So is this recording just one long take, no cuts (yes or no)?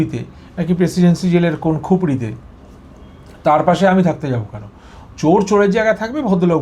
yes